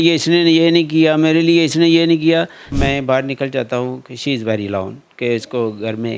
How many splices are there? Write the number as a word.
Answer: one